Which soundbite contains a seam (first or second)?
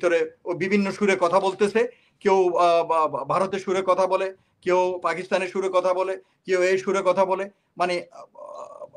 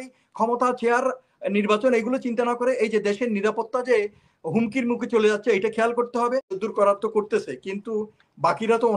second